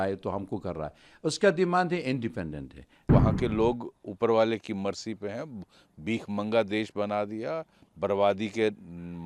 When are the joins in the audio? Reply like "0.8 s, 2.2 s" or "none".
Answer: 3.1 s